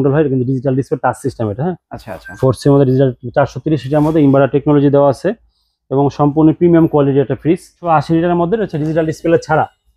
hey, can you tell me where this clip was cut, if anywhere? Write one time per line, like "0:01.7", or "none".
0:07.8